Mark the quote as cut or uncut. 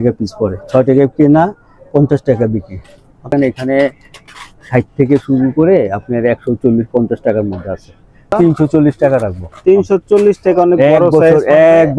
cut